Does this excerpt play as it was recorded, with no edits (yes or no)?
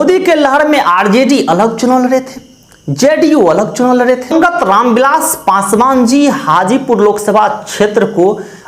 no